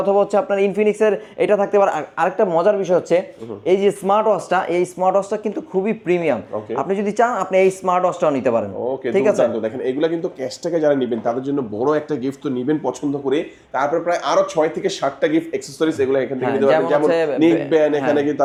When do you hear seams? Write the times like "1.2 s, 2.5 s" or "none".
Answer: none

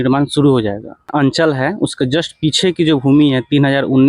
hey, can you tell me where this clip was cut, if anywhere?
1.1 s

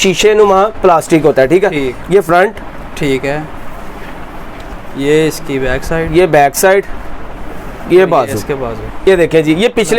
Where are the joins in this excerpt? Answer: 9.0 s

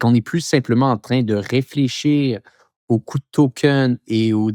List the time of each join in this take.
none

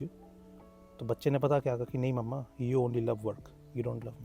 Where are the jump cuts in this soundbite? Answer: none

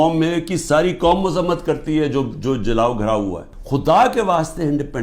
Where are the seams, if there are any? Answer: 3.5 s

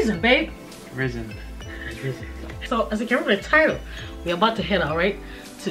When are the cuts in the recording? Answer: none

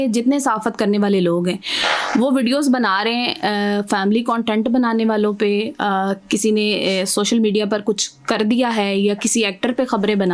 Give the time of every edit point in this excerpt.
none

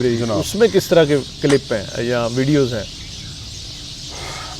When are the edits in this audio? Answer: none

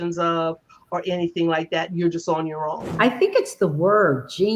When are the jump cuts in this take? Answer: 2.9 s

